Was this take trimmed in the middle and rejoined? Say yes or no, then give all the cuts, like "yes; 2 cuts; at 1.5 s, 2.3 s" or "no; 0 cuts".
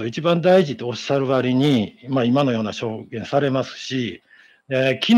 no; 0 cuts